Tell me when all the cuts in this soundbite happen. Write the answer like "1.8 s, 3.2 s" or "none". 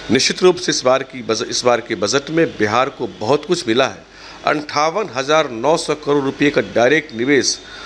none